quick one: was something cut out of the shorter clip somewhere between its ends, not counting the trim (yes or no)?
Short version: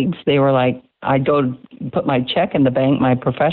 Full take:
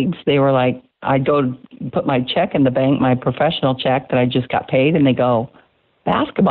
no